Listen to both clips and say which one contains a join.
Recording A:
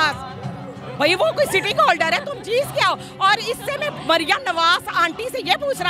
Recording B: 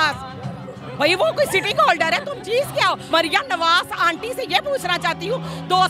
B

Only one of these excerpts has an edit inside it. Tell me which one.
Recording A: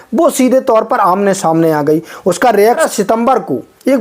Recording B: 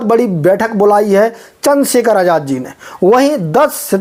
A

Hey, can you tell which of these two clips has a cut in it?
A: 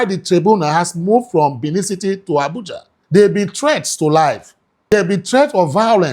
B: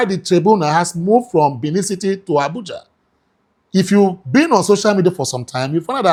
A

